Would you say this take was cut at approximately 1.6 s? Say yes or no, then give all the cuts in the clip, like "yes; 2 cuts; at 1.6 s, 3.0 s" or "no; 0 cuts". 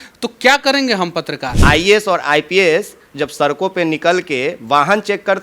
yes; 1 cut; at 1.6 s